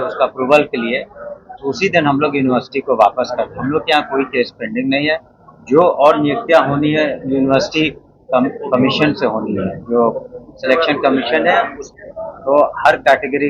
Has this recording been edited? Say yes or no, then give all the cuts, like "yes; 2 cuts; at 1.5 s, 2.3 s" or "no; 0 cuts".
yes; 1 cut; at 11.8 s